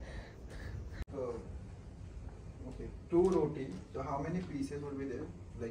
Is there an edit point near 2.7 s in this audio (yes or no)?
no